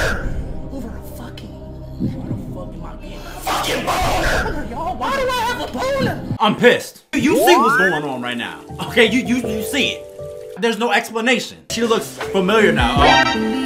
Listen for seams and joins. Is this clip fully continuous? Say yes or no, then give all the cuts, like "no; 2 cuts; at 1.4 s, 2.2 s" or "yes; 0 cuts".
no; 3 cuts; at 6.3 s, 7.1 s, 11.7 s